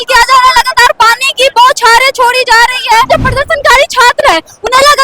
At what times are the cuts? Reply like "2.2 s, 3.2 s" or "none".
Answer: 3.1 s